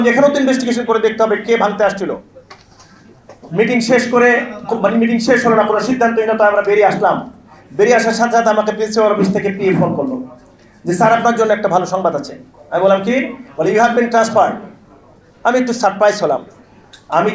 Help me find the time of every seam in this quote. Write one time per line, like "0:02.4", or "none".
none